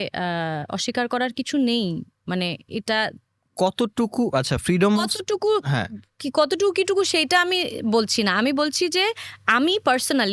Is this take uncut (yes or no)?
yes